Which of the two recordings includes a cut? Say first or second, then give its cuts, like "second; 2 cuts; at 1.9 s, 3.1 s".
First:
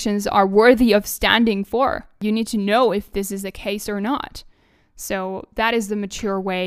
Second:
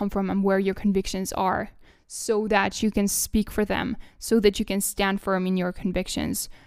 first; 1 cut; at 2.2 s